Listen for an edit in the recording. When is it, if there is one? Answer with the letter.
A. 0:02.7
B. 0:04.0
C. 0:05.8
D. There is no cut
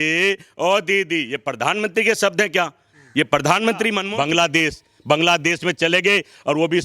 B